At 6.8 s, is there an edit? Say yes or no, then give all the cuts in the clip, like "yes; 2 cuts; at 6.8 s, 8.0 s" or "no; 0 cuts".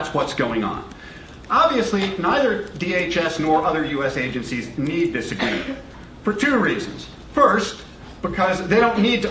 yes; 1 cut; at 6.8 s